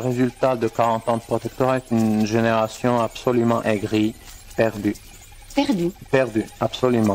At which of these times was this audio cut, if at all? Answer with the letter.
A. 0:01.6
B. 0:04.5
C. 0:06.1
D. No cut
B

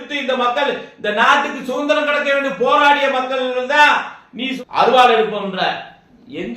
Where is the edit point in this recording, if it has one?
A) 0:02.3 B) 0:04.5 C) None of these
B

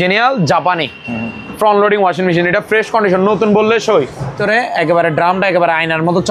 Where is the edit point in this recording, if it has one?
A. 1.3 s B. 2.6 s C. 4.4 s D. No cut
C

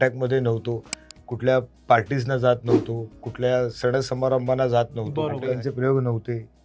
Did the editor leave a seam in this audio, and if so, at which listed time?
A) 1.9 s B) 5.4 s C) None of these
B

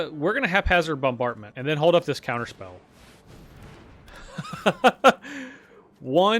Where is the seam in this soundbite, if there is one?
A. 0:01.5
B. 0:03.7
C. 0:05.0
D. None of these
A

